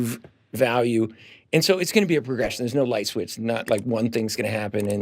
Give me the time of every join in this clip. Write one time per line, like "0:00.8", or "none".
none